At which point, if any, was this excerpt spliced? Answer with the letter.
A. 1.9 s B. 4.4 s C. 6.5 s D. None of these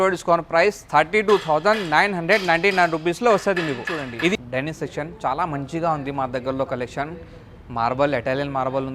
B